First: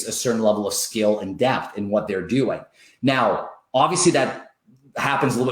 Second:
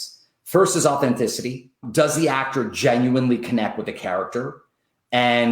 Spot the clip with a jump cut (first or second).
second